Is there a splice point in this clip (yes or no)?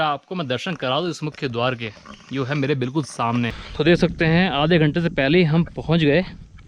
yes